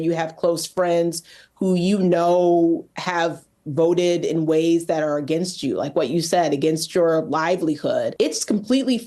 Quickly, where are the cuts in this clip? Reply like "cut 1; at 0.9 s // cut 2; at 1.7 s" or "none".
cut 1; at 8.1 s